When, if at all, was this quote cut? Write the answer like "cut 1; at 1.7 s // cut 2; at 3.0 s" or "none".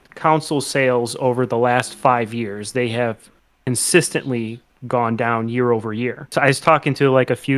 cut 1; at 6.3 s

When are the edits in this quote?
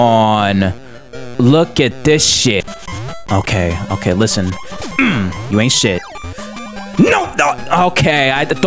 cut 1; at 2.6 s

